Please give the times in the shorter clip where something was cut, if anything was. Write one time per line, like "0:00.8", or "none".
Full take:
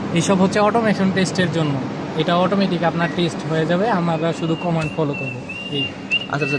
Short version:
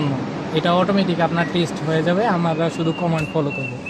none